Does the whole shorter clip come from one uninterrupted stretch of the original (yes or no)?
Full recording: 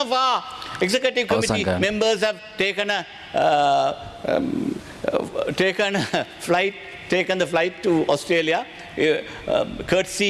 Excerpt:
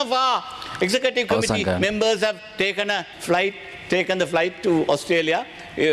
no